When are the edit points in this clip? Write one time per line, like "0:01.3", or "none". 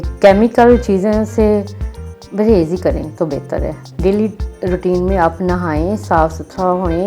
0:03.8